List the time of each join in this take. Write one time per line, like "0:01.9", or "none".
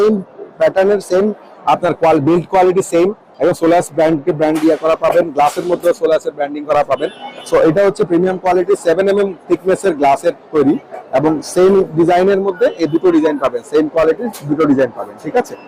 none